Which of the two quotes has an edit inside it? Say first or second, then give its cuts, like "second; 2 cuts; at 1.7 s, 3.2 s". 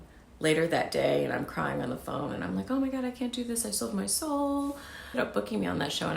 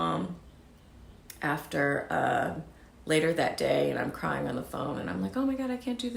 first; 1 cut; at 5.2 s